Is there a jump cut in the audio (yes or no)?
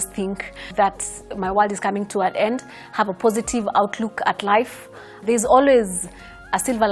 yes